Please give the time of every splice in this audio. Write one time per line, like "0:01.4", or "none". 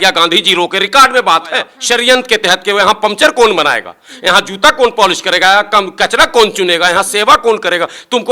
0:01.8